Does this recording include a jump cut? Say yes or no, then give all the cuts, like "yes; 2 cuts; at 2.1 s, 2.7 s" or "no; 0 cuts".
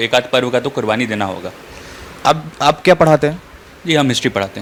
no; 0 cuts